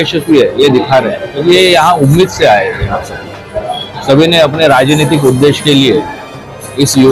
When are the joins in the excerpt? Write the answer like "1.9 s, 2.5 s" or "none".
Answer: 3.8 s